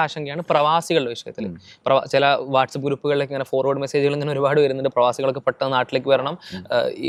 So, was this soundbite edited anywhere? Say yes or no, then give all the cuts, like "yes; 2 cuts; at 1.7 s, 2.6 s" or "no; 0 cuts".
no; 0 cuts